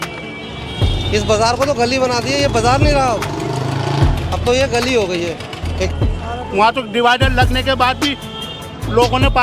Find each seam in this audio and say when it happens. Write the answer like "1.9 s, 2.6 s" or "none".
5.9 s